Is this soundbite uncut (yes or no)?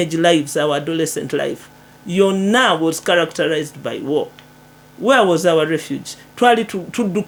yes